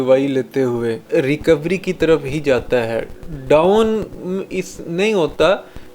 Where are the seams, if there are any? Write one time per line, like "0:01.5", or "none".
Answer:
0:01.0